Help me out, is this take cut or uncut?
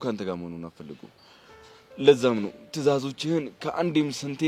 uncut